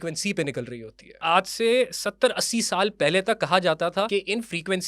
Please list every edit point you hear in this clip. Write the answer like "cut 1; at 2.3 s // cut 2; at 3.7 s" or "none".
cut 1; at 1.2 s // cut 2; at 4.1 s